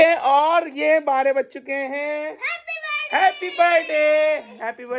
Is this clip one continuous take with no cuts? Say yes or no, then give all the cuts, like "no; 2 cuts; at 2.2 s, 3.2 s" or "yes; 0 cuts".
yes; 0 cuts